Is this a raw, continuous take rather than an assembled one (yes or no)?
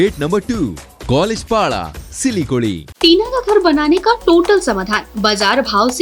no